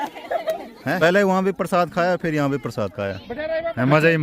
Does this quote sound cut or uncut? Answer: cut